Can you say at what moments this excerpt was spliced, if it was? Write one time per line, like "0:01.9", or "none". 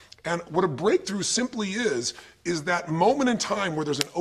0:02.2